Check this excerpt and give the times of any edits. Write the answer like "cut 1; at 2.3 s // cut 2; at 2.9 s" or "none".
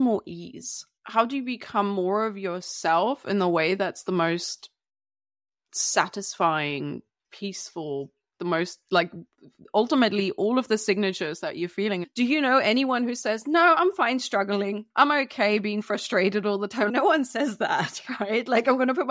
cut 1; at 1.0 s // cut 2; at 12.1 s // cut 3; at 14.9 s // cut 4; at 16.9 s